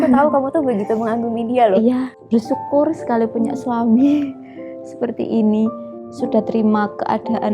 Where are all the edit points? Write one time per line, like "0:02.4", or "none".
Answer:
0:02.2